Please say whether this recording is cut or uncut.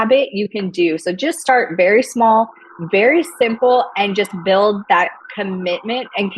uncut